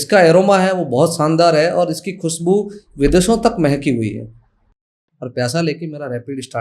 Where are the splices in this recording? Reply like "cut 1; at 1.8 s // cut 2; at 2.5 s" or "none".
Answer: cut 1; at 4.7 s